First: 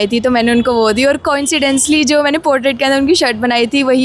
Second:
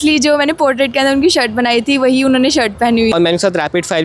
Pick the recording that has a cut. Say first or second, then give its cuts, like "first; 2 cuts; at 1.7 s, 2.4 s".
second; 1 cut; at 3.1 s